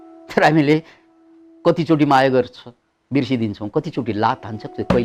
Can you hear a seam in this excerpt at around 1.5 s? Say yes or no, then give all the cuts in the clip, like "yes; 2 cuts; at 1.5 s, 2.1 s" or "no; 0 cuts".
no; 0 cuts